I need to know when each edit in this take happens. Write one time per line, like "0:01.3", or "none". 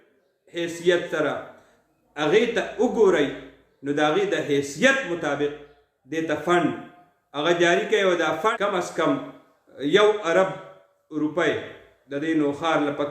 0:08.5